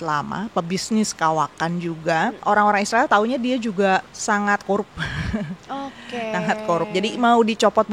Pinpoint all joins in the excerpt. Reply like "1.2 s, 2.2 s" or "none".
2.4 s, 4.1 s